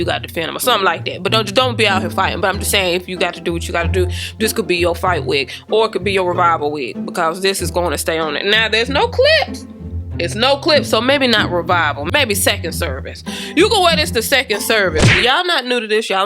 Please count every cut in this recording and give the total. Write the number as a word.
one